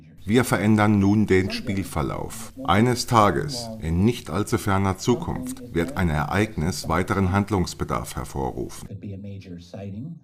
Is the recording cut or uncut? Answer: cut